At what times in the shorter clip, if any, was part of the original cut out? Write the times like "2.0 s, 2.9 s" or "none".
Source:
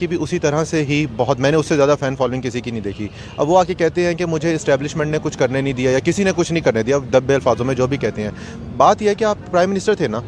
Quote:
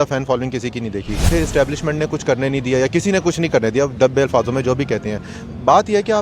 1.3 s